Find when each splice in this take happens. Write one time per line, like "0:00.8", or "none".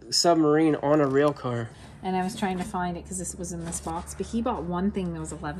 0:01.7